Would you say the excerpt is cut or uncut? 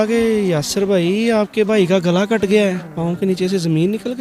cut